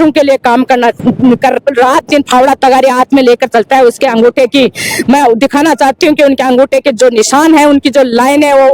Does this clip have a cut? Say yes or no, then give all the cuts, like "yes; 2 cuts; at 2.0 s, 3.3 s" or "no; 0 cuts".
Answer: yes; 1 cut; at 1.6 s